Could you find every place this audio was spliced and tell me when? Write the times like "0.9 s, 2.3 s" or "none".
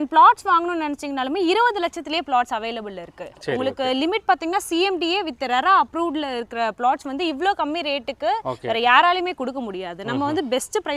none